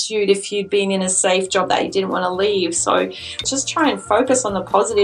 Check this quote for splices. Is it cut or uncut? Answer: cut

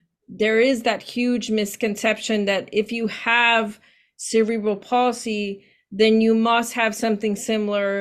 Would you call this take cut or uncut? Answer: uncut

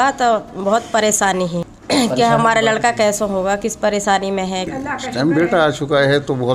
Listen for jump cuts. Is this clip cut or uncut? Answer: cut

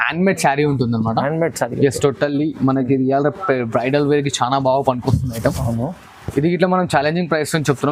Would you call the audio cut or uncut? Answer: uncut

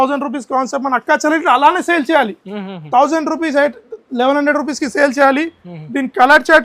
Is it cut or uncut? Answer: uncut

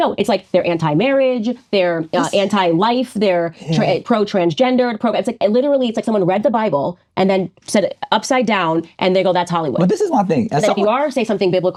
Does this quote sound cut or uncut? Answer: uncut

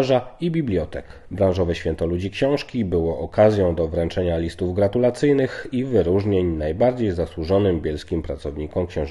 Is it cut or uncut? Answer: uncut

